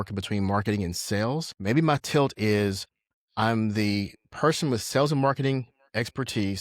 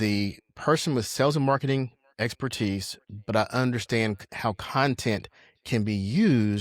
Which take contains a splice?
first; 1 cut; at 1.5 s

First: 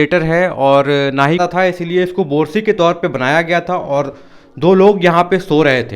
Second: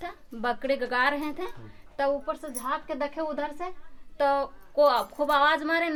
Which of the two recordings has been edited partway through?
first; 1 cut; at 1.4 s

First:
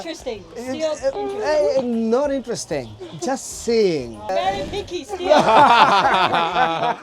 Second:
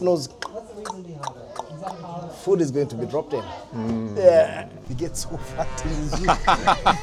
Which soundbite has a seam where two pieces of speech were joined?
first; 1 cut; at 4.3 s

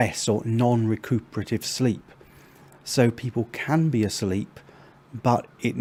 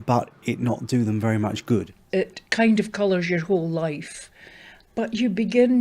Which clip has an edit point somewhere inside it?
second; 1 cut; at 2.0 s

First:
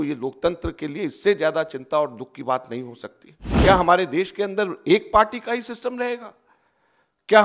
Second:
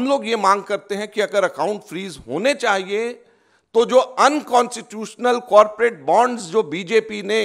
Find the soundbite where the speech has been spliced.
first; 1 cut; at 3.7 s

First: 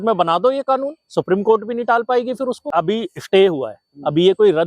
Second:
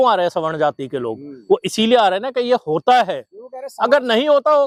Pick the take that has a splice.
first; 1 cut; at 2.7 s

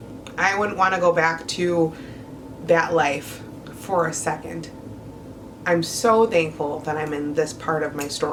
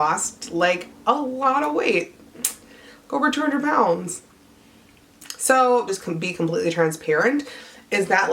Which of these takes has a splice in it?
second; 1 cut; at 5.9 s

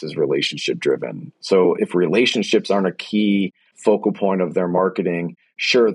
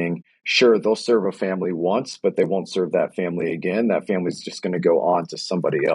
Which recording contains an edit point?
first; 2 cuts; at 1.8 s, 3.6 s

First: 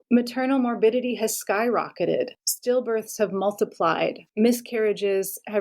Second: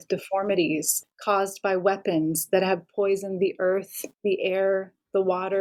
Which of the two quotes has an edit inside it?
first; 1 cut; at 4.2 s

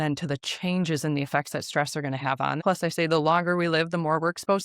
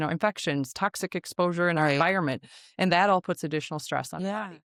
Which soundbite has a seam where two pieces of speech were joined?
first; 1 cut; at 2.6 s

